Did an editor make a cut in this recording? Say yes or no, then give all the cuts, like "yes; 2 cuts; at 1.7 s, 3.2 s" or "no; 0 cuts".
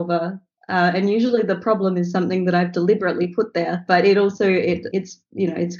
yes; 2 cuts; at 3.8 s, 4.8 s